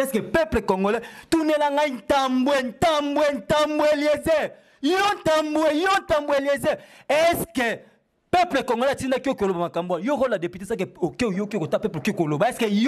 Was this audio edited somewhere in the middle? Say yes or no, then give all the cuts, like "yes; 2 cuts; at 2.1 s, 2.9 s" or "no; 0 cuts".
no; 0 cuts